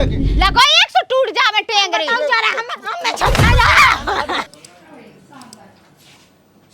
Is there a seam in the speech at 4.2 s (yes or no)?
yes